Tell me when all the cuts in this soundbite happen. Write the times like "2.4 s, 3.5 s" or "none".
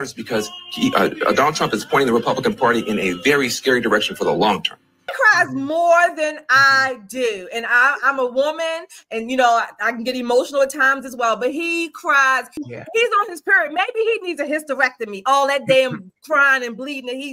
5.1 s, 12.6 s